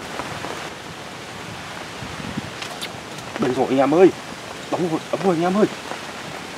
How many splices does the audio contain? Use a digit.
0